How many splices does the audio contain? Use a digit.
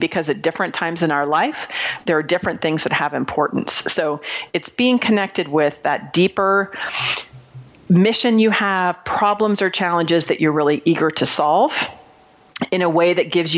0